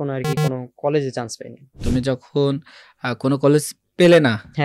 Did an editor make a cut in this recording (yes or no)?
yes